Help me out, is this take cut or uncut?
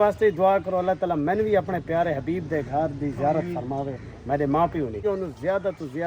cut